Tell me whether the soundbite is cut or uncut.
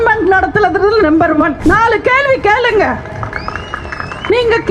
cut